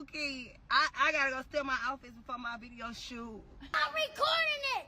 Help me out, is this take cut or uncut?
cut